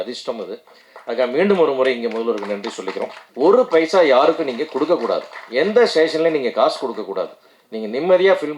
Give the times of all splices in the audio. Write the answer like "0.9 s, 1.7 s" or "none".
3.2 s